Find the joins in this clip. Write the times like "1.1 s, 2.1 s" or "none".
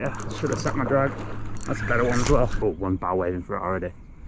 2.5 s